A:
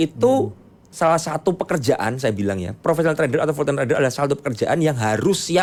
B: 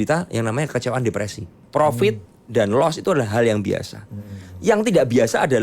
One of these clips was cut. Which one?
B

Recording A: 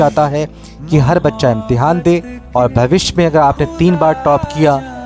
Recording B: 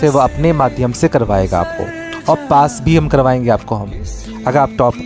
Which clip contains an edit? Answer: A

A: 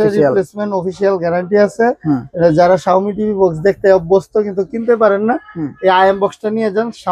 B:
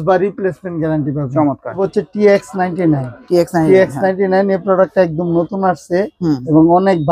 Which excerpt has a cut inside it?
B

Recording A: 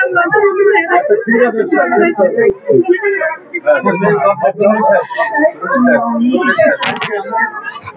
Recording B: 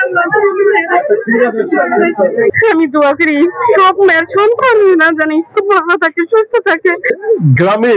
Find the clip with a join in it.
B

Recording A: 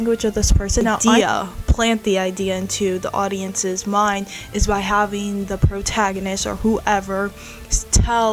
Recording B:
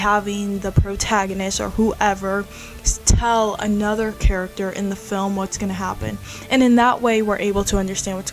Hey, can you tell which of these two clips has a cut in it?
A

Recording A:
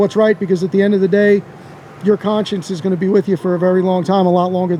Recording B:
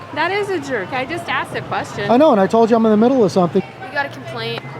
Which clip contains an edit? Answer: B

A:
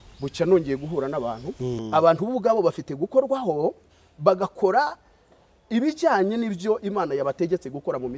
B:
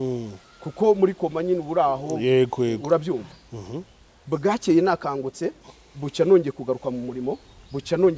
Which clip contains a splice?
A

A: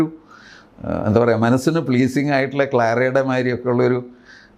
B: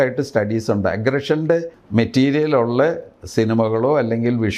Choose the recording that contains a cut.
B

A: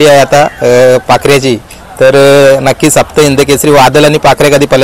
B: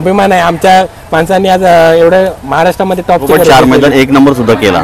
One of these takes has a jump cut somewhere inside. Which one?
B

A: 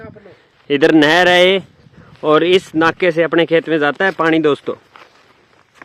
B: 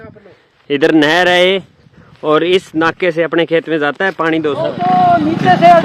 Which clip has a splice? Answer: B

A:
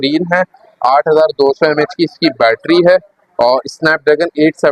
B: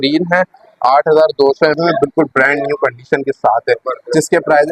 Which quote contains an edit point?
B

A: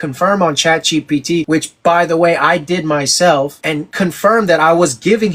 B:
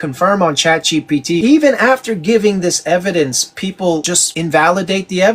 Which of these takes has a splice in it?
B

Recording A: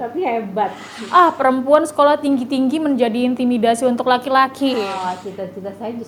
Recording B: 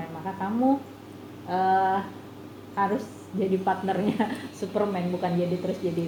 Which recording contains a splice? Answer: A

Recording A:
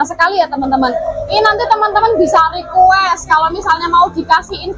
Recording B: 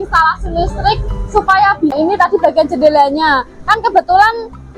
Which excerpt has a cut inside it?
B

